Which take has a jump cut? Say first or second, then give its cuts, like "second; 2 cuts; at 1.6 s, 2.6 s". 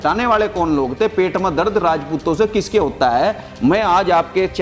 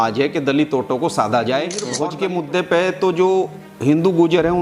second; 1 cut; at 2.0 s